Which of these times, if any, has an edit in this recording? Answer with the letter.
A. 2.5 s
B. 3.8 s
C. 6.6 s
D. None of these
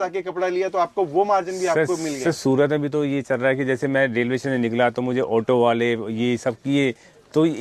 D